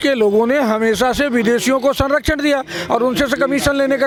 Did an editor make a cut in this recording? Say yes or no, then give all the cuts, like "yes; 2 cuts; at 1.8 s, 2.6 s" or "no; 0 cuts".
no; 0 cuts